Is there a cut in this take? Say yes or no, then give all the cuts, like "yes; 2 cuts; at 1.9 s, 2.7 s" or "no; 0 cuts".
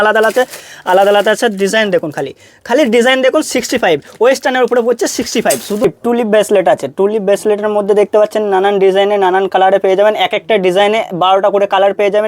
yes; 1 cut; at 5.8 s